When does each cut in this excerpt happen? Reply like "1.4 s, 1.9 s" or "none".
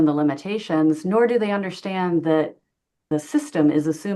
3.1 s

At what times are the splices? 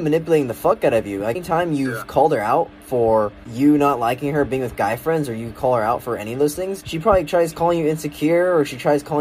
1.4 s, 3.4 s, 6.8 s

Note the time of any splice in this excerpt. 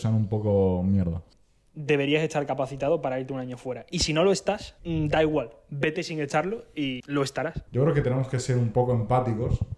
1.3 s, 4.7 s, 7.1 s

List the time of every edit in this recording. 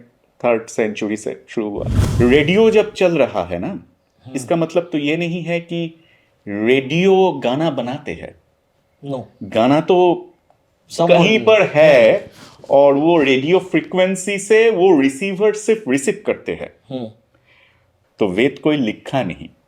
2.0 s

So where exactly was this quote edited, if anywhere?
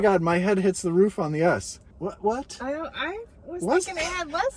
1.8 s

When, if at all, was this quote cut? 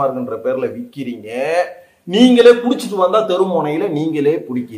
none

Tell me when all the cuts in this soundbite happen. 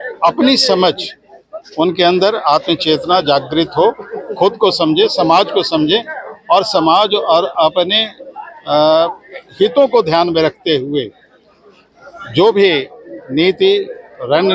none

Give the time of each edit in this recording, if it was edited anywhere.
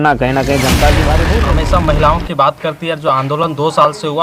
1.2 s

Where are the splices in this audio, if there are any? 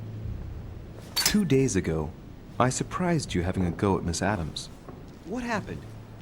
1.3 s

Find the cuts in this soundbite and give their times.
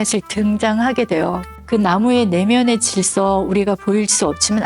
1.5 s

